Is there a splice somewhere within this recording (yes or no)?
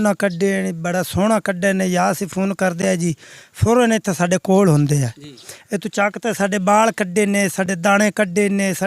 no